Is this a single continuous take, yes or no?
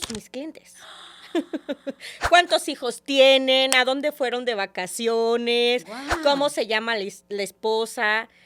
yes